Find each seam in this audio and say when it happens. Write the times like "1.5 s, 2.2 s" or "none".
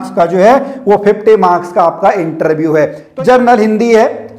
3.0 s